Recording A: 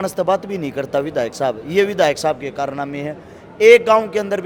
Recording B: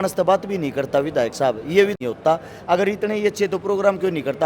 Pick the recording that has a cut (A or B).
B